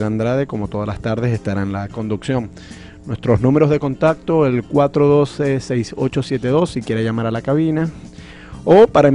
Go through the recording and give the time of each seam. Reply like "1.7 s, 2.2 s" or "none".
none